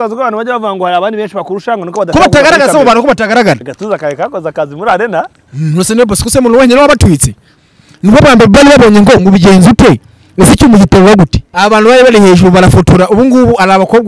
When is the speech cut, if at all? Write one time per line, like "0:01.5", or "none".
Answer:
0:03.7
0:11.4